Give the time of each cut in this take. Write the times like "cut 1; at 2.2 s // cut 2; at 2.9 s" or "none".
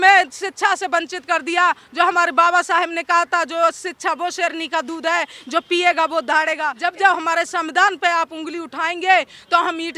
cut 1; at 6.7 s